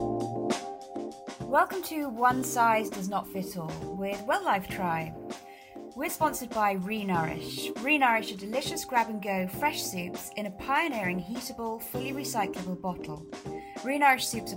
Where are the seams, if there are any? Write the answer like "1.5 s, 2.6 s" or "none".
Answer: 1.5 s